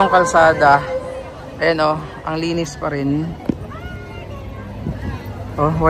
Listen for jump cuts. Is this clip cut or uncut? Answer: uncut